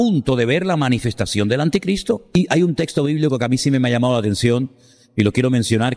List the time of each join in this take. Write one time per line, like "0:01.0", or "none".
0:02.3